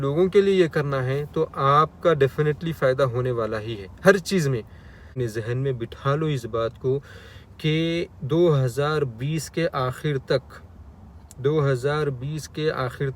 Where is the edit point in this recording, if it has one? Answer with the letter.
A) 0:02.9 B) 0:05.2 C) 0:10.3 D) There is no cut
B